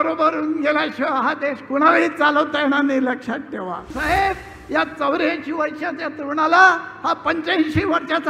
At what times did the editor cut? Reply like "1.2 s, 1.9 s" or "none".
3.9 s